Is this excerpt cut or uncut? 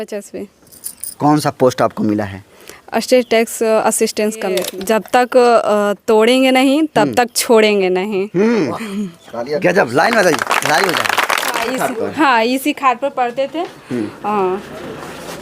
cut